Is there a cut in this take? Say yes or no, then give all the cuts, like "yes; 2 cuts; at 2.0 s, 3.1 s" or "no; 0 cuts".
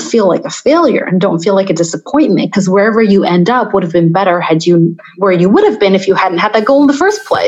yes; 1 cut; at 5.1 s